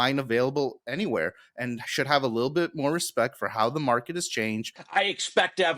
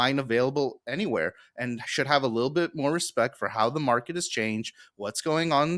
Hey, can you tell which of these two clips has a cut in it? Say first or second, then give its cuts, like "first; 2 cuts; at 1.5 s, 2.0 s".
first; 1 cut; at 4.7 s